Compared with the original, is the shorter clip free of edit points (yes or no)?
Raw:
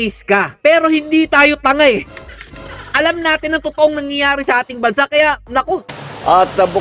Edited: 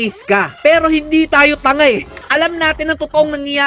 no